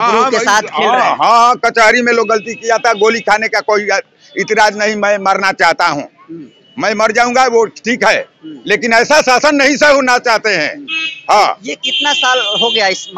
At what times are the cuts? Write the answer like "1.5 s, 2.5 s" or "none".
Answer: none